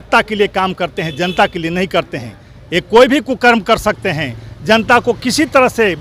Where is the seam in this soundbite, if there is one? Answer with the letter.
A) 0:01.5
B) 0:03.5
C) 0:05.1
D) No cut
D